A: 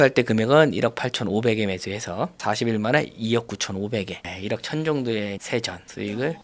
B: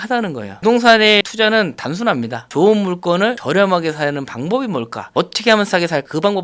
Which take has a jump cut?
B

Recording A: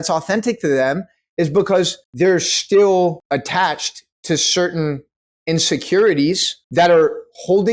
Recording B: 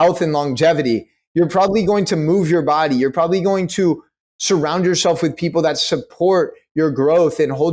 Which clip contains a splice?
A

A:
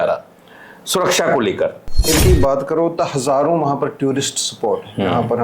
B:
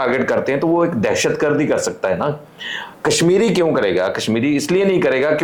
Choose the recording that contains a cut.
A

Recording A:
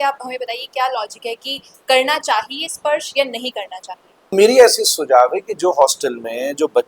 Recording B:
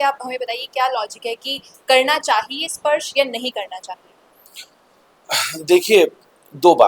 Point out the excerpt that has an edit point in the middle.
A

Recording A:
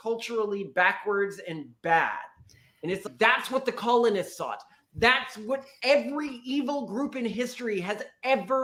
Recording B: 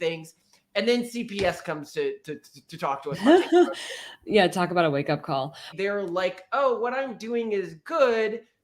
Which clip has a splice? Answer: B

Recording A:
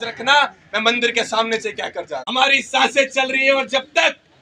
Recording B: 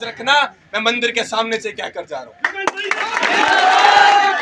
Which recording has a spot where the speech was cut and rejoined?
A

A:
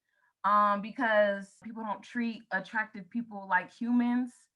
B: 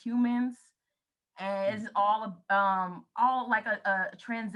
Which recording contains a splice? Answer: A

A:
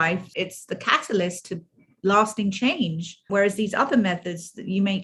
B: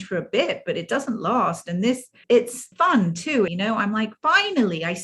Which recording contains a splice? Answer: B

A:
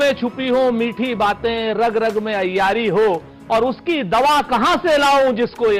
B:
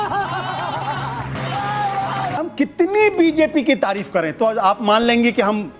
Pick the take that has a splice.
B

